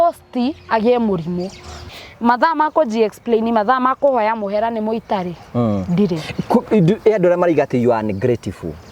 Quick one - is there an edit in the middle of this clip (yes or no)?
yes